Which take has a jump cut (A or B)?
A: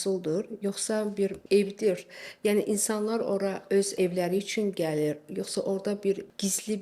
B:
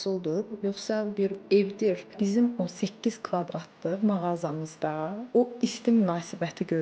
B